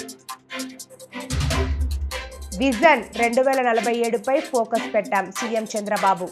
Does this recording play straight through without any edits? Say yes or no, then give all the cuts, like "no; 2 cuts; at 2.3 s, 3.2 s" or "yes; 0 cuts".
no; 1 cut; at 2.4 s